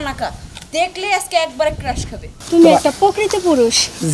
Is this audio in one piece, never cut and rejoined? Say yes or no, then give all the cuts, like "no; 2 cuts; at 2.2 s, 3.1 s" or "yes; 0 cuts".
no; 1 cut; at 2.3 s